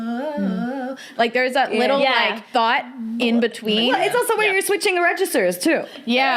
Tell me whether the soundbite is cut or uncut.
cut